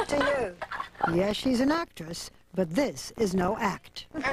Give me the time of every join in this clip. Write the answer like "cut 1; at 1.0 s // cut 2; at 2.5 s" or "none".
none